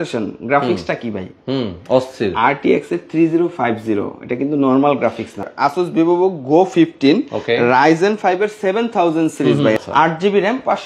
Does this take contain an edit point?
yes; 2 cuts; at 5.5 s, 9.8 s

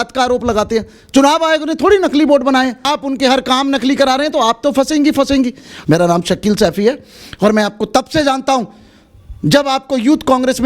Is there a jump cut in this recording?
yes; 2 cuts; at 2.9 s, 5.6 s

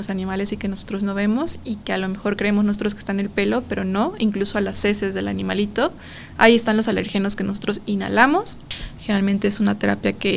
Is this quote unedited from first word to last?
no; 1 cut; at 8.7 s

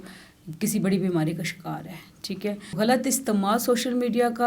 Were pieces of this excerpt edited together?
yes; 1 cut; at 2.7 s

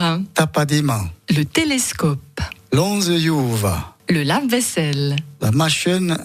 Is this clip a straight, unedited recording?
no; 2 cuts; at 1.1 s, 3.9 s

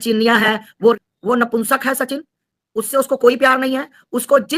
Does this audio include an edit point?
yes; 1 cut; at 0.9 s

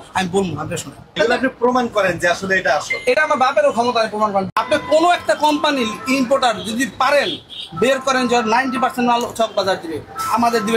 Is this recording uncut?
no; 2 cuts; at 1.0 s, 4.5 s

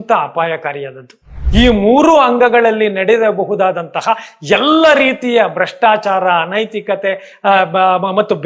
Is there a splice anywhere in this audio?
yes; 1 cut; at 1.4 s

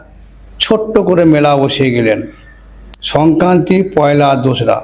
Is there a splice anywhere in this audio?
no; 0 cuts

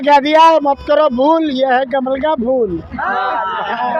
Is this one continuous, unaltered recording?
yes; 0 cuts

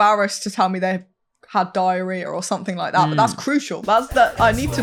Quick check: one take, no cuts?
yes; 0 cuts

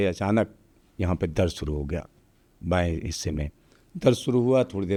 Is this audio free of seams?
yes; 0 cuts

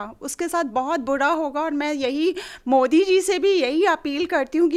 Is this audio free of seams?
yes; 0 cuts

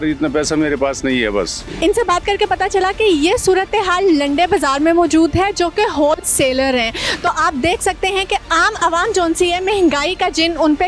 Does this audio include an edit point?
no; 0 cuts

